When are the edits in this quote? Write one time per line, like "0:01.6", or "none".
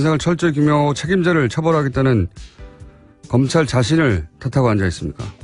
0:04.0